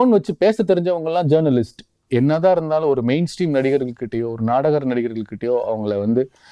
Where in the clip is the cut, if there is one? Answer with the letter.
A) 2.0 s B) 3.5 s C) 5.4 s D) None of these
A